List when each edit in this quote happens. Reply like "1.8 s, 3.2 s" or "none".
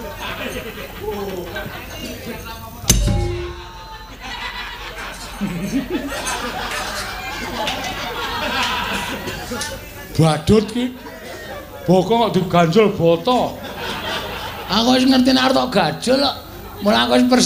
none